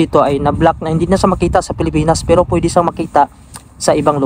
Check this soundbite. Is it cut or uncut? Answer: uncut